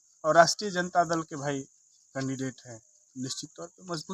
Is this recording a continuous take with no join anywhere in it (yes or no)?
yes